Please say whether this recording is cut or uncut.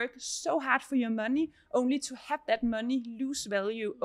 uncut